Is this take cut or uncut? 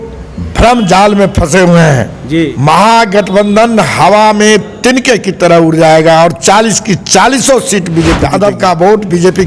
cut